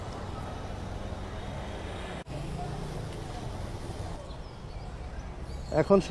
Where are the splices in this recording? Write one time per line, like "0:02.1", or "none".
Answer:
0:02.3
0:04.2

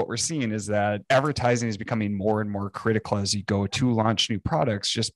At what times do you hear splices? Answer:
0:01.0

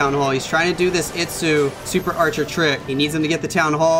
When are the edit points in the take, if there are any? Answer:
0:01.8
0:02.8

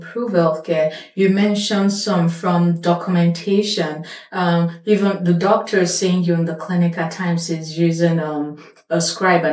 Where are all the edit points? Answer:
none

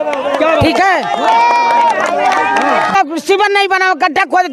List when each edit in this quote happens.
0:02.9

